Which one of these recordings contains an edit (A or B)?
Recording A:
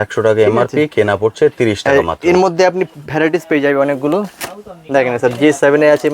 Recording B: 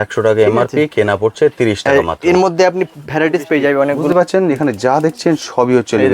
B